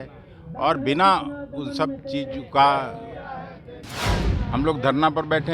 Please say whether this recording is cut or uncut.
cut